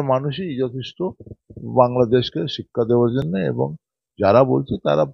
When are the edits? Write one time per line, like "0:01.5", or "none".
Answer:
none